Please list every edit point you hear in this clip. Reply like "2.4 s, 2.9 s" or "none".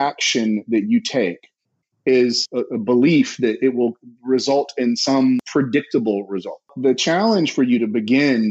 2.4 s, 5.5 s, 6.7 s

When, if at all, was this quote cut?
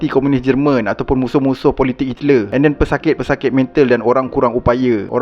none

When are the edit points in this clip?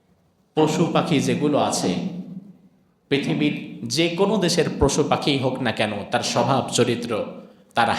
none

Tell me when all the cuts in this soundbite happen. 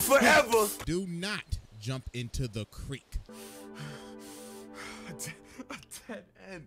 0.8 s, 3.4 s

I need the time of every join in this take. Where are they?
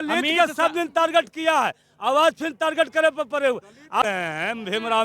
4.0 s

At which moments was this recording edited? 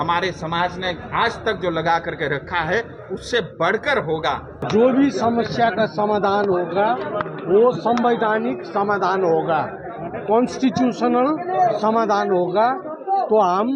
4.6 s

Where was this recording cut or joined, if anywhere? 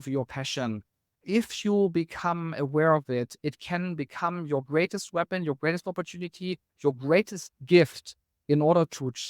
1.2 s

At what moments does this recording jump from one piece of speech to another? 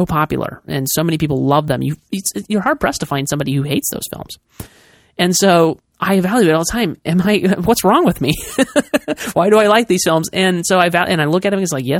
1.7 s

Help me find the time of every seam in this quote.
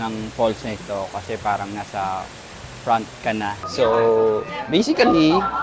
3.6 s

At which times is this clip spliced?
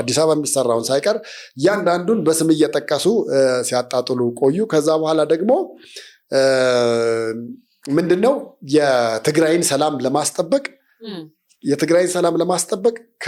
none

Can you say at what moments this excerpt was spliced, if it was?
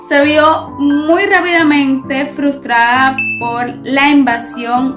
none

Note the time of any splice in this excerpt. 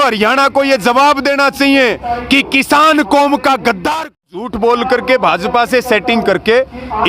4.2 s

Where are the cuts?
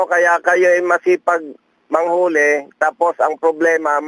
none

